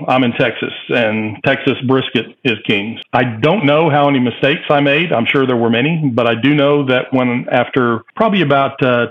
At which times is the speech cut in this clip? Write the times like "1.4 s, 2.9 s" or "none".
2.9 s, 8.1 s